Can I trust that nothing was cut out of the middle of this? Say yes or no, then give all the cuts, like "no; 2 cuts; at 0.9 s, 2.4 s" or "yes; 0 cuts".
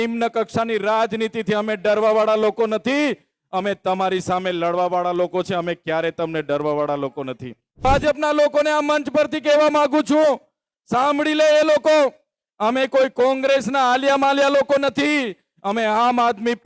no; 1 cut; at 7.8 s